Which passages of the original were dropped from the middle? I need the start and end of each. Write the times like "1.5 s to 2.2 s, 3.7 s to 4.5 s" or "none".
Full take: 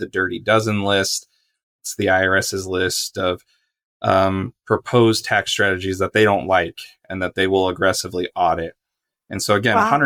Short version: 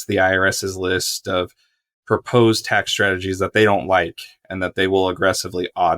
3.8 s to 4.5 s